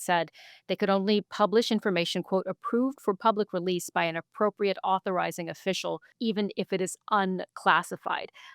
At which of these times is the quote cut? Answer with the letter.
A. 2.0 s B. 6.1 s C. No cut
B